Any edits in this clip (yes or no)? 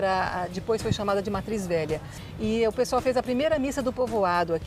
yes